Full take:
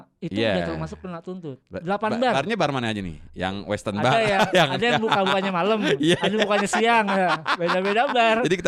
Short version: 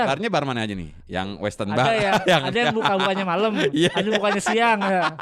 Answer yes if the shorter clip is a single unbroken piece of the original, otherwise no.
yes